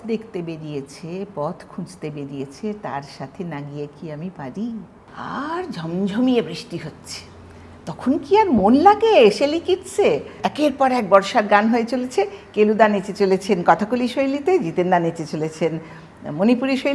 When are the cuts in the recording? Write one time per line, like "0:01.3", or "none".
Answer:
0:05.0
0:10.4